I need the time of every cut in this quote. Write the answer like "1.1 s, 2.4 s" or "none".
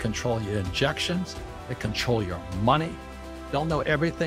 3.3 s